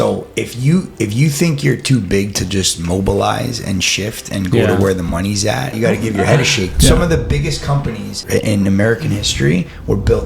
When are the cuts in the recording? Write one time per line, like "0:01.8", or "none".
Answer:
0:05.7
0:06.7
0:08.1